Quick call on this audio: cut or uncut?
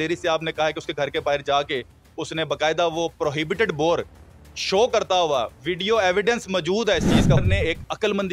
cut